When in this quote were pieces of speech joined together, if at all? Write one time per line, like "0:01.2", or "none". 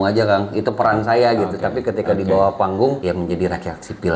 0:03.0